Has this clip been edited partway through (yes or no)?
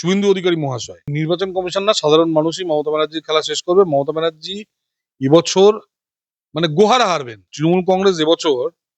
yes